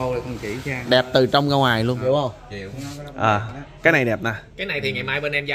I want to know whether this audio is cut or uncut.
cut